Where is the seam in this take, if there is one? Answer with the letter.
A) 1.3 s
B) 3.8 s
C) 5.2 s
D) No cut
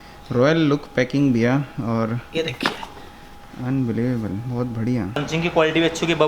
C